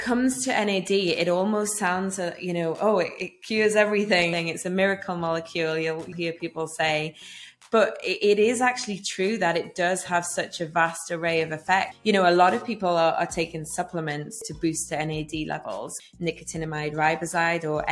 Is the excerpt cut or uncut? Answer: cut